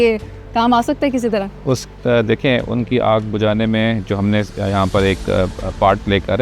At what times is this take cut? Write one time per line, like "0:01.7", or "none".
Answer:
none